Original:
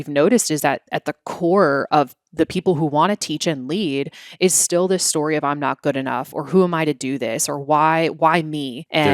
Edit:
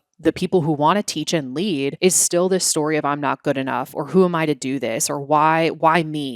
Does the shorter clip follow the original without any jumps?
no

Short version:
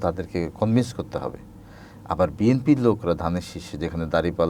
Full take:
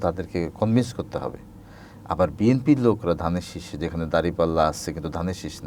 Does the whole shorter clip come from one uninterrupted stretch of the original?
yes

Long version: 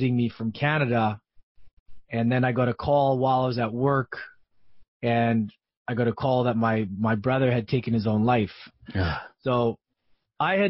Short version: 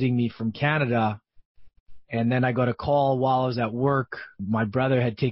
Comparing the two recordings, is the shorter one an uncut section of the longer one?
no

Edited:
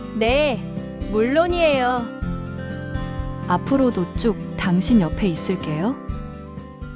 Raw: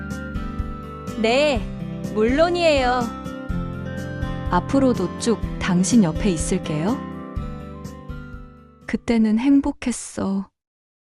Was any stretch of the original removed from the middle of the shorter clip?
yes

